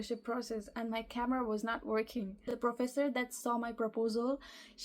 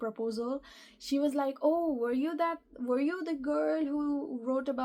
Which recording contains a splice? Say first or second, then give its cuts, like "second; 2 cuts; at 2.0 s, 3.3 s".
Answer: first; 1 cut; at 2.5 s